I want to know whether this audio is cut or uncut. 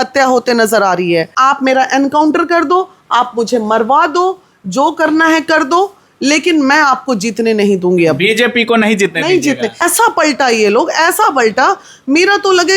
cut